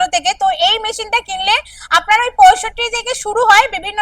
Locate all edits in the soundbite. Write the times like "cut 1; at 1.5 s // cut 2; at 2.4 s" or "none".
none